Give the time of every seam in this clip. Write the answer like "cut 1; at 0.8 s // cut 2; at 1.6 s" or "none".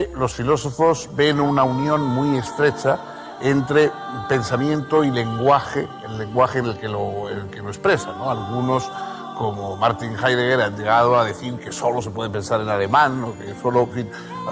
cut 1; at 11.8 s